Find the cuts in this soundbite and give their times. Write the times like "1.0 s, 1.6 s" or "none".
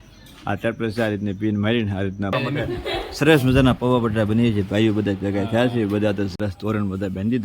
2.3 s, 6.4 s